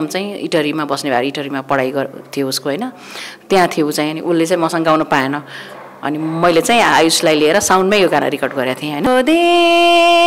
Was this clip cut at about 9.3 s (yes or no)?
yes